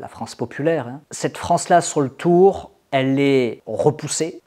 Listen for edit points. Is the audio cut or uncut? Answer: uncut